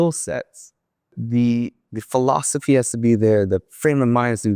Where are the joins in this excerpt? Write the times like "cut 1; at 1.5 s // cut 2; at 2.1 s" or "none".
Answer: cut 1; at 1.2 s